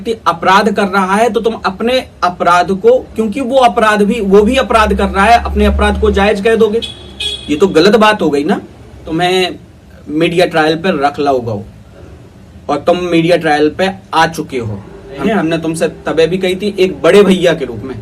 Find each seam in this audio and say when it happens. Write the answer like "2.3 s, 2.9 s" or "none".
9.1 s, 15.2 s